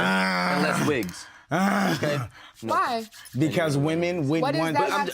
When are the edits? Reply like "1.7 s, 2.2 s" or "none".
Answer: 2.2 s